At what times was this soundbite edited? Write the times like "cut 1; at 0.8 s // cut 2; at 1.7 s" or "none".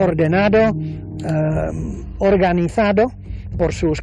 cut 1; at 2.7 s

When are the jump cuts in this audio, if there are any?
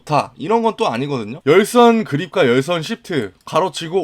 cut 1; at 1.4 s

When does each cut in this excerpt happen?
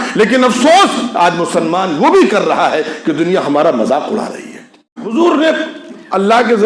cut 1; at 5.1 s

